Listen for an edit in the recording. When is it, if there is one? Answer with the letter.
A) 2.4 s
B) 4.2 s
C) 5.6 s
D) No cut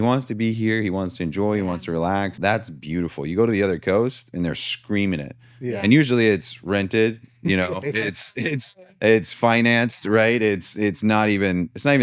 A